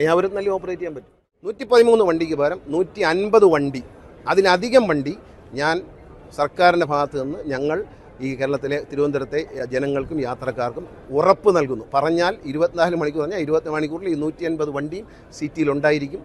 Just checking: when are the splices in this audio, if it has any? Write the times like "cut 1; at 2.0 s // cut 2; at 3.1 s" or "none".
cut 1; at 1.6 s